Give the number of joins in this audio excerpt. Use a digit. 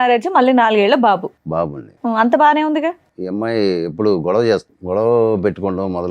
2